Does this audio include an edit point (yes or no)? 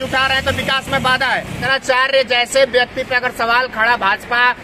yes